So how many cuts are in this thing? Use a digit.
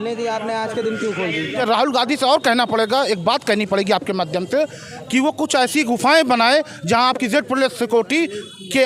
1